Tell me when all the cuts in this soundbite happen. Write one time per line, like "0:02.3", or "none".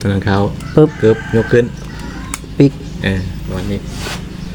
none